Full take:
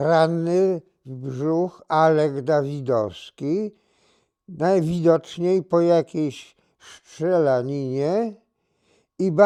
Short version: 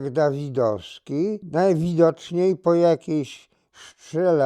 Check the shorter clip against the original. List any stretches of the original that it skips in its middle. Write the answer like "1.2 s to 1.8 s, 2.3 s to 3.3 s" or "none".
3.7 s to 4.5 s